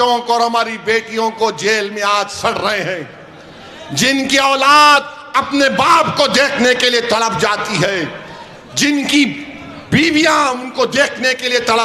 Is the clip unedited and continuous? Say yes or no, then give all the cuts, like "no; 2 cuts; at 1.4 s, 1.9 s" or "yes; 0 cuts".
yes; 0 cuts